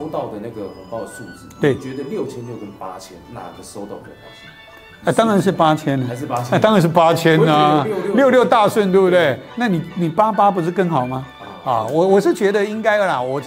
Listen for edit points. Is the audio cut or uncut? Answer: uncut